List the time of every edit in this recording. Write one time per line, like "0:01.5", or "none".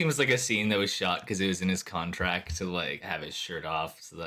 0:03.0